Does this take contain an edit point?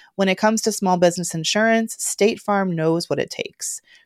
no; 0 cuts

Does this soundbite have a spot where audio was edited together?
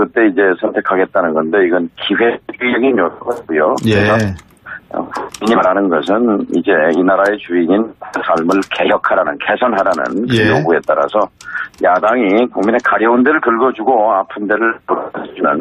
no; 0 cuts

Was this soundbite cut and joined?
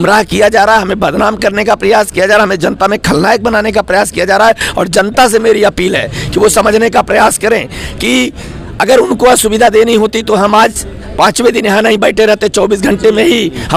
no; 0 cuts

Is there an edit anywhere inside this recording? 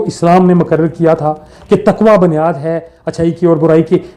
no; 0 cuts

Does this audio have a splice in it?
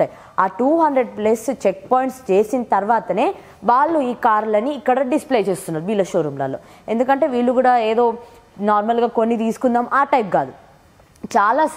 no; 0 cuts

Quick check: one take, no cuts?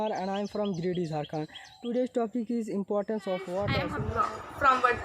no; 1 cut; at 3.9 s

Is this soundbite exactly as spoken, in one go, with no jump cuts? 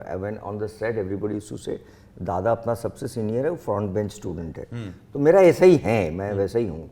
yes; 0 cuts

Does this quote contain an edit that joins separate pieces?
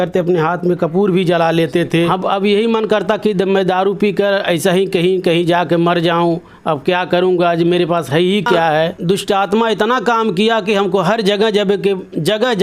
yes; 2 cuts; at 2.1 s, 9.0 s

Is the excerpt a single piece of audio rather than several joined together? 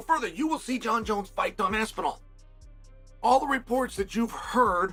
yes; 0 cuts

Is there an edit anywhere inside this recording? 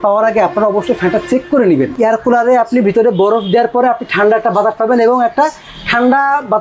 yes; 1 cut; at 1.9 s

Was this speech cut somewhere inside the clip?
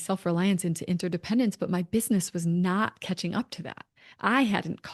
no; 0 cuts

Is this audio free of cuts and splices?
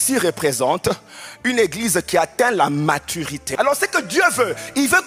no; 1 cut; at 3.4 s

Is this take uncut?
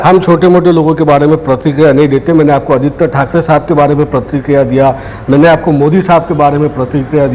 yes; 0 cuts

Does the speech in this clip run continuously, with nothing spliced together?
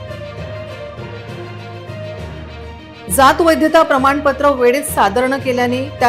no; 1 cut; at 1.0 s

